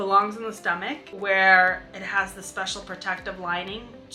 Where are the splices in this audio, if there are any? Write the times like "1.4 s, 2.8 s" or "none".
1.1 s